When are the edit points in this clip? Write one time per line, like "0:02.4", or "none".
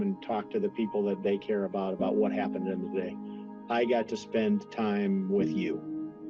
0:05.4